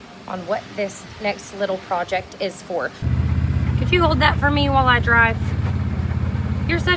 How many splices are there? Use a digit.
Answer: 1